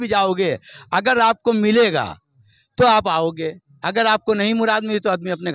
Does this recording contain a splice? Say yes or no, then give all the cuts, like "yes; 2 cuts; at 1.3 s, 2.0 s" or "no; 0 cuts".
no; 0 cuts